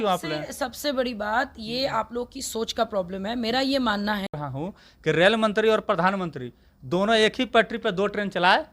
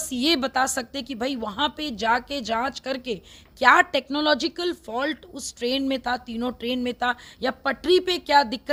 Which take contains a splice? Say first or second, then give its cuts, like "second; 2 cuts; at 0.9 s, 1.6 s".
first; 1 cut; at 4.3 s